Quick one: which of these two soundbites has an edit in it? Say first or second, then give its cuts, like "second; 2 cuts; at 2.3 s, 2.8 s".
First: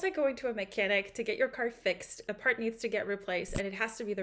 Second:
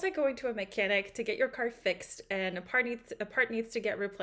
first; 1 cut; at 2.2 s